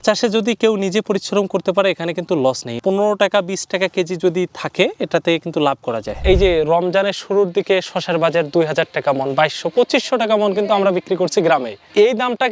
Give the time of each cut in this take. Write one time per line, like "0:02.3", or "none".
0:02.7
0:06.2